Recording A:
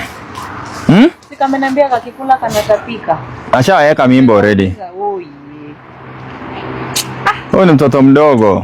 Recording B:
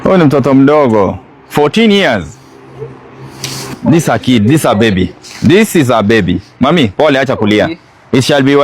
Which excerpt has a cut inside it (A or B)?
B